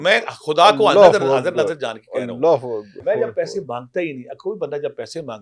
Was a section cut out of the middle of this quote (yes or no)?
yes